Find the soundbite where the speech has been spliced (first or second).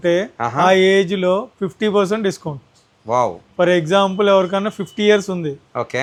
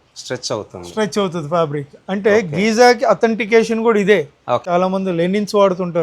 second